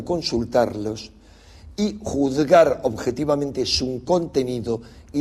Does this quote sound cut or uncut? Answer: cut